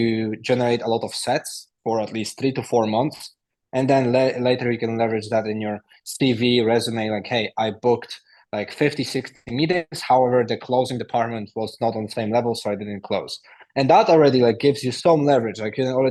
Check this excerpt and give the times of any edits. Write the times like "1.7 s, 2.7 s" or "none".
none